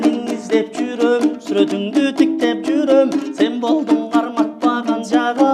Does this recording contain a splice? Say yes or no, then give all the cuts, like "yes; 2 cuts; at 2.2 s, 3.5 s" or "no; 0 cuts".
no; 0 cuts